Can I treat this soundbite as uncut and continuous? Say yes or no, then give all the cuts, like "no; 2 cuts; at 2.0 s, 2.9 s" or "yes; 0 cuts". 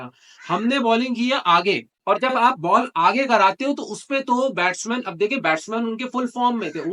no; 1 cut; at 1.9 s